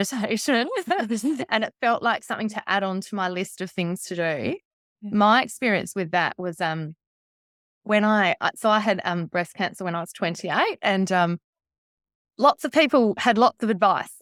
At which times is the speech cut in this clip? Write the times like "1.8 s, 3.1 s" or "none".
none